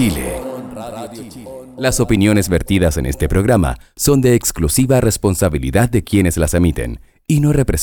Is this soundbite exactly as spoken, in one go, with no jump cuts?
no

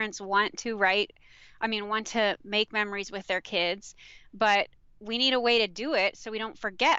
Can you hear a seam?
no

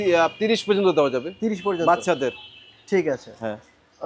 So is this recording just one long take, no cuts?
yes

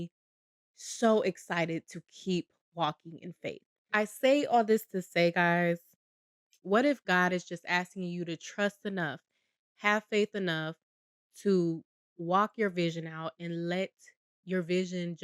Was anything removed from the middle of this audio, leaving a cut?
no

